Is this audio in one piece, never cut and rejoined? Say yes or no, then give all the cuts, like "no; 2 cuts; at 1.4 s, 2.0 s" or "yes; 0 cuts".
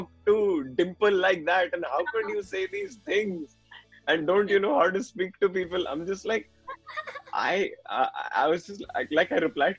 yes; 0 cuts